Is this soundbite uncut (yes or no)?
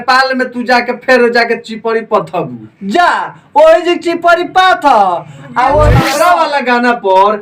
no